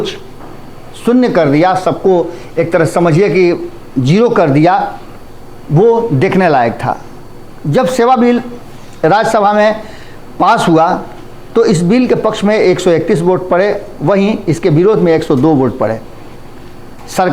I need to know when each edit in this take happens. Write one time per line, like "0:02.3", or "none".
none